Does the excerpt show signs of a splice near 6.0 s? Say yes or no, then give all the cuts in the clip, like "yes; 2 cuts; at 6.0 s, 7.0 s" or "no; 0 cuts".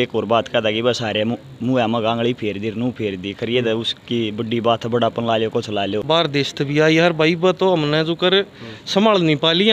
yes; 1 cut; at 6.0 s